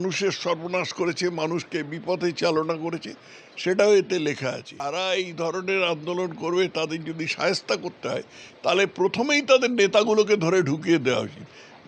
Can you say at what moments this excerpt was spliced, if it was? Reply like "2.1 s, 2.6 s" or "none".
4.8 s